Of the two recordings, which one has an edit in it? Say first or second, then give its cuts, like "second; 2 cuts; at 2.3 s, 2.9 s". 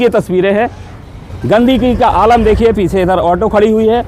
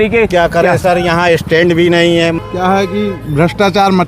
second; 1 cut; at 2.4 s